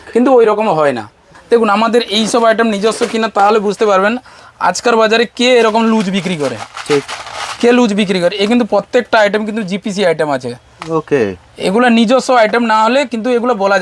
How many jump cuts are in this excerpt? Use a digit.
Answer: 1